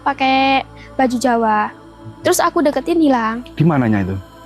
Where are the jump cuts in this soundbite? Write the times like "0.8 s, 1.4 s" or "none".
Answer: none